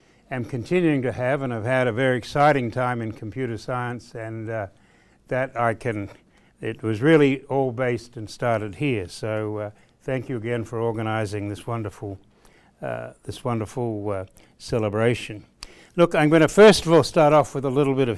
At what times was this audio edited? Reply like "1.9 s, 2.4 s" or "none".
4.0 s